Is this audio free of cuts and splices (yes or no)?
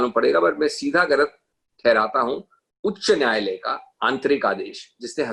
yes